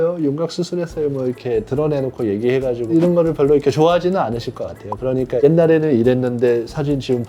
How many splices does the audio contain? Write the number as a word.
one